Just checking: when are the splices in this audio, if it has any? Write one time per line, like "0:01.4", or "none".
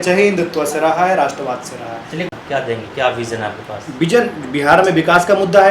0:02.3

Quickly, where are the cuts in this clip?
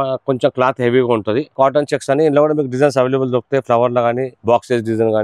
0:01.5
0:04.3

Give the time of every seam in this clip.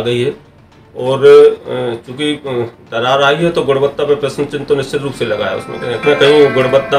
0:06.0

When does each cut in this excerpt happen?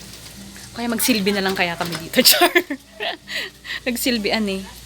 none

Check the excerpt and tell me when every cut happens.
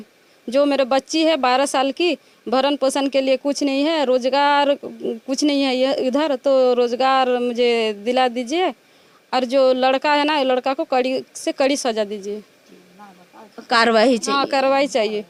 none

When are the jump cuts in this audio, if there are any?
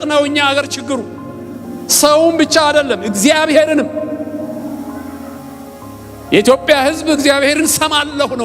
none

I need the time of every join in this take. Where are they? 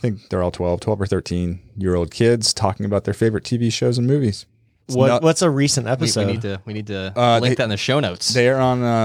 0:04.8

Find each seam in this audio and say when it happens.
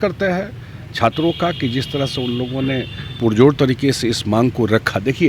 none

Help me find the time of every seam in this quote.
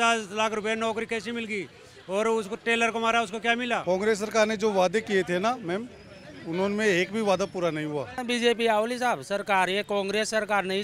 0:03.8
0:08.2

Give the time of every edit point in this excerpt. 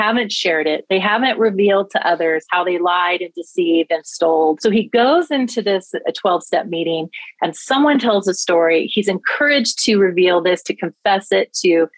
0:04.6

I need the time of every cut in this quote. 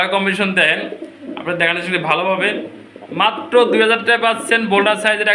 none

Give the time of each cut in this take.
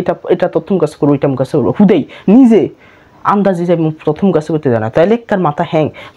none

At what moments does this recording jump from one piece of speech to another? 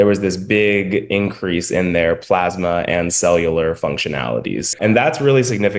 0:04.8

